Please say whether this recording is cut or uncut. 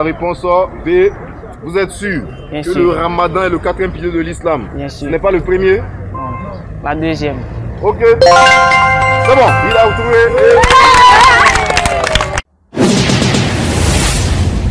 cut